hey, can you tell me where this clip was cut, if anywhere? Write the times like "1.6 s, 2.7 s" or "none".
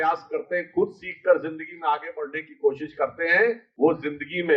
3.7 s